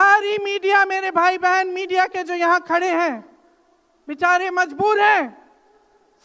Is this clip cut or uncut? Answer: uncut